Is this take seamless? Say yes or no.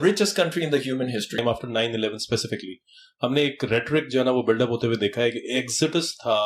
no